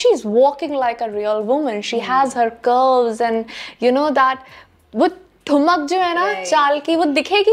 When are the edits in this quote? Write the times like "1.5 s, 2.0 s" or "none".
none

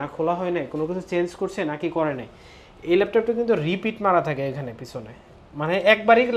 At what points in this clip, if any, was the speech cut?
none

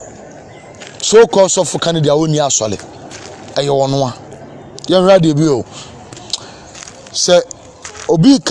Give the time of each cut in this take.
6.8 s

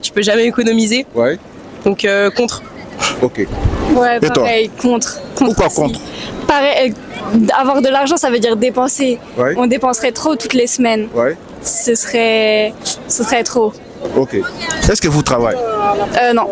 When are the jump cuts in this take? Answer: none

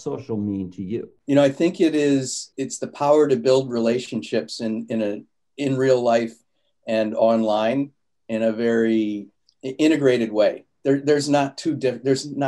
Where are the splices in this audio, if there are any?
1.1 s, 2.4 s

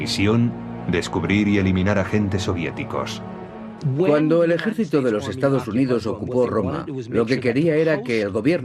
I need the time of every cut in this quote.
none

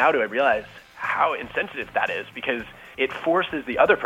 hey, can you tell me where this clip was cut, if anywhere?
1.9 s, 2.8 s

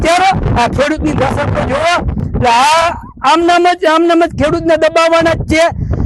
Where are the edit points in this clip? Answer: none

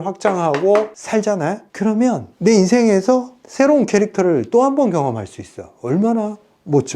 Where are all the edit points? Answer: 1.0 s

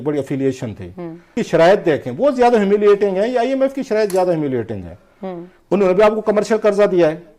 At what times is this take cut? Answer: 1.3 s

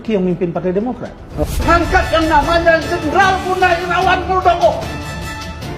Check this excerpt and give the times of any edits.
1.6 s

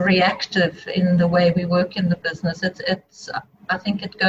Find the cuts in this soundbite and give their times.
none

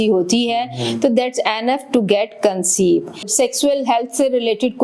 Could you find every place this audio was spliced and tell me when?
3.3 s

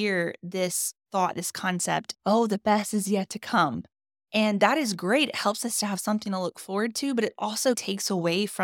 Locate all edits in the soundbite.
2.1 s

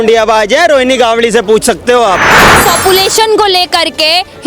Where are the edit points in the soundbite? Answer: 2.6 s

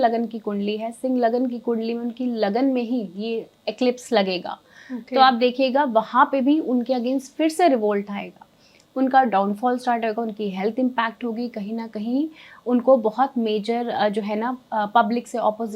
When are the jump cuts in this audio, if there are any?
none

